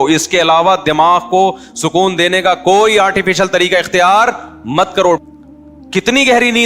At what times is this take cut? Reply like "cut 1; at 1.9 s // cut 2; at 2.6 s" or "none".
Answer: cut 1; at 5.2 s